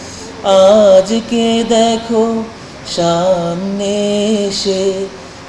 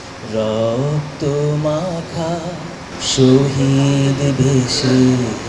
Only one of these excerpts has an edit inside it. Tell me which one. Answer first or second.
second